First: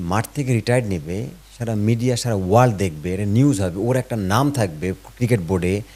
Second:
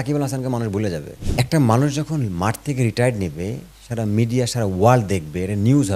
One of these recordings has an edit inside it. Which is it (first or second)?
second